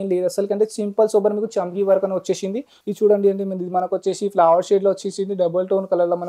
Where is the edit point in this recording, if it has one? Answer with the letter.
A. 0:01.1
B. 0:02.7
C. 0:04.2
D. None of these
B